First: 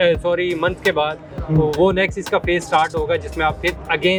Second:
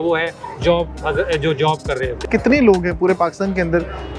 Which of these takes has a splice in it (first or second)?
second